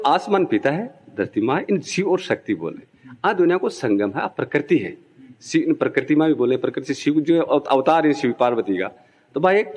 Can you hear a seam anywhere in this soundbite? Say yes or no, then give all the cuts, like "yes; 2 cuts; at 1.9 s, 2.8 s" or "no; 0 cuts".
no; 0 cuts